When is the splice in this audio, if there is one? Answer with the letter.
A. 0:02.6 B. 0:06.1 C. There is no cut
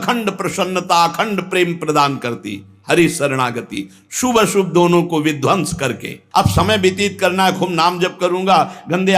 B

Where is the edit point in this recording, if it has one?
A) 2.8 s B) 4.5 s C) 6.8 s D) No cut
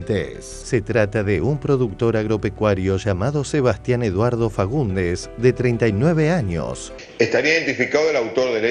C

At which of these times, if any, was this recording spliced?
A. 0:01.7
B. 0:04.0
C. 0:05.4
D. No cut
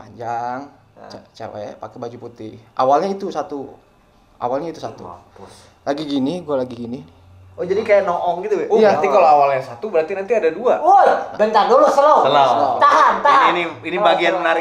D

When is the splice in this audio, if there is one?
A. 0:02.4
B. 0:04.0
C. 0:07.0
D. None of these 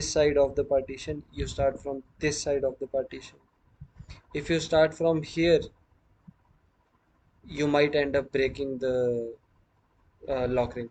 D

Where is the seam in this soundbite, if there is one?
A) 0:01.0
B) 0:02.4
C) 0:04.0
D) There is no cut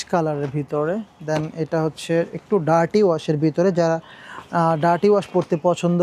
D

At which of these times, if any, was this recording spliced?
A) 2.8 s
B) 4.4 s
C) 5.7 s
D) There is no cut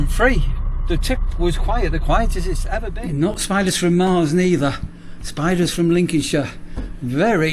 A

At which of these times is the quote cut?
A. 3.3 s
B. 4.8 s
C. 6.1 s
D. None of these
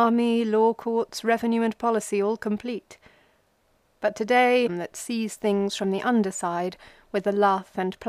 D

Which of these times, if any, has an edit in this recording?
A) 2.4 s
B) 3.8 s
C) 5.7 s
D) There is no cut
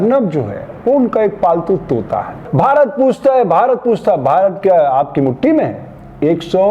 A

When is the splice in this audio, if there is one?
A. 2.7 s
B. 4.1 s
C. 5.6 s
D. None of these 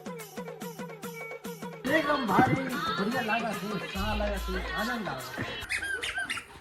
C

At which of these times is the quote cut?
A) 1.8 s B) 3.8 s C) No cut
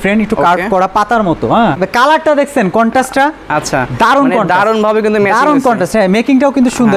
A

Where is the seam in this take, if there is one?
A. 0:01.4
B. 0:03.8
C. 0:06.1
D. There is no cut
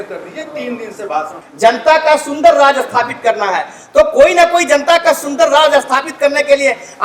A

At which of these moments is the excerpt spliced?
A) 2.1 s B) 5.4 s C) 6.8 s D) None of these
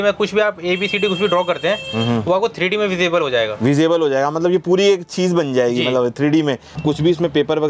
C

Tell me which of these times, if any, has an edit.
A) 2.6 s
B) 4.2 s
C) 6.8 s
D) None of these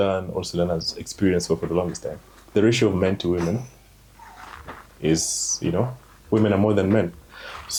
D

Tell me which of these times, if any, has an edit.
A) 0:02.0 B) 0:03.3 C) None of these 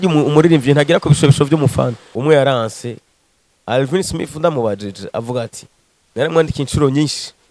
A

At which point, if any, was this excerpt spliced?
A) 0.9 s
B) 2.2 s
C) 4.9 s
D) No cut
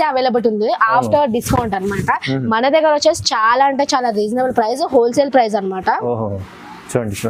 D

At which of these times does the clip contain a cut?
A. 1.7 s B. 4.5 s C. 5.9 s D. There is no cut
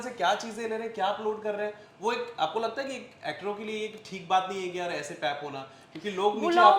D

